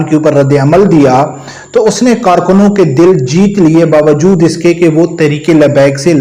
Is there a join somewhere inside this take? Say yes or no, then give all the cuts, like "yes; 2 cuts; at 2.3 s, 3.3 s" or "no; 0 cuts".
no; 0 cuts